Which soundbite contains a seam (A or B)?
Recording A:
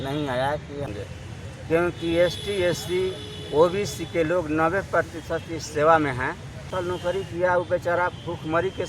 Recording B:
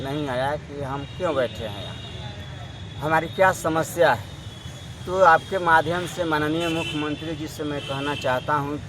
A